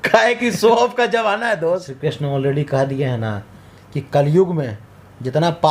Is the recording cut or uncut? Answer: cut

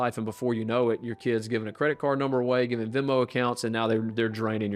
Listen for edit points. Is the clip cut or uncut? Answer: uncut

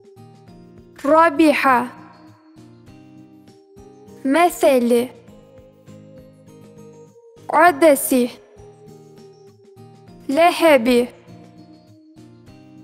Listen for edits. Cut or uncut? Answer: cut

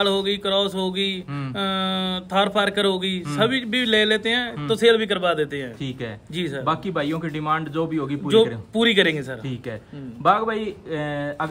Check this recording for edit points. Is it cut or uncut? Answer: uncut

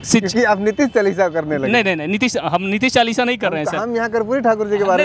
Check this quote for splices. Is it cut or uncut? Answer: uncut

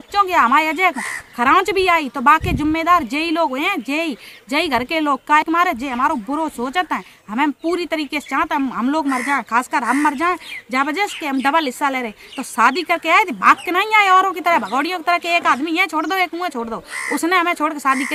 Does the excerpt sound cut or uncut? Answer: uncut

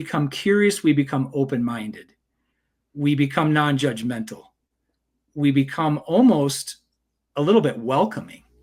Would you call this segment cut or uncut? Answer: uncut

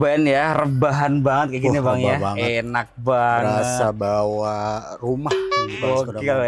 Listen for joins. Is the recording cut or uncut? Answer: uncut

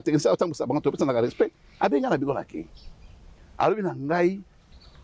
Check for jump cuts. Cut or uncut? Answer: uncut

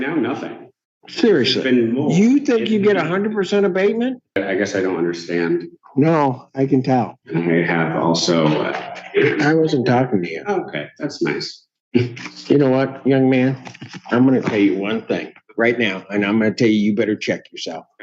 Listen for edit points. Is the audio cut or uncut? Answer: cut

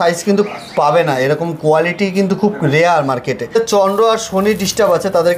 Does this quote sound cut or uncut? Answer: cut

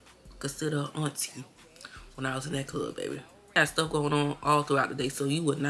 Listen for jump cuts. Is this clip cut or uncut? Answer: cut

